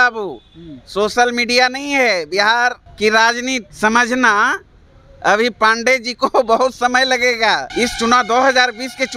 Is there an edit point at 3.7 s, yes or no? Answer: yes